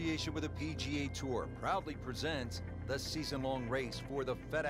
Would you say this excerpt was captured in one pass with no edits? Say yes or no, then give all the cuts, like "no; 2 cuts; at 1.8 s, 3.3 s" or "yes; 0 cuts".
yes; 0 cuts